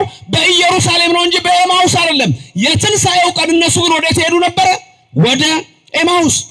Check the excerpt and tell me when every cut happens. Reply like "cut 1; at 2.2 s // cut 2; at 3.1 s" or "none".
none